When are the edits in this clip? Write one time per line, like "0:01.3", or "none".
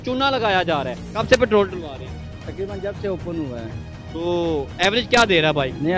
0:01.1